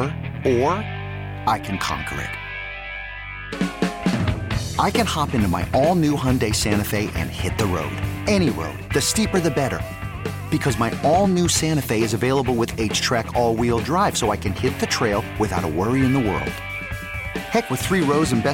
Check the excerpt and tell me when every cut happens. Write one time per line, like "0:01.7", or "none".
none